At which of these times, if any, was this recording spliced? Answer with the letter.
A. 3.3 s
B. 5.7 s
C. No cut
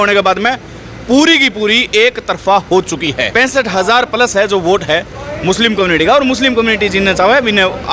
A